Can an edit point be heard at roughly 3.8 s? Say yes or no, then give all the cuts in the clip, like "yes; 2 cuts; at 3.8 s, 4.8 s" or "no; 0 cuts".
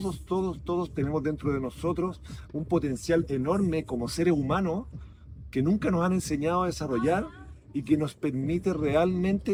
no; 0 cuts